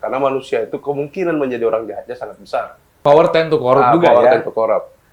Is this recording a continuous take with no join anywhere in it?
no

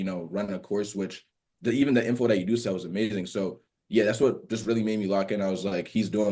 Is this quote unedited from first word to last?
yes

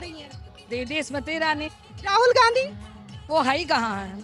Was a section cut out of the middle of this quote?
no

